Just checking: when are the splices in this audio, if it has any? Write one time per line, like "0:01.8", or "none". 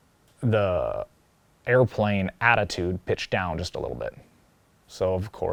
none